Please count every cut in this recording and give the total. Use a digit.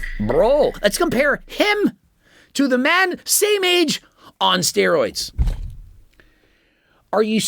2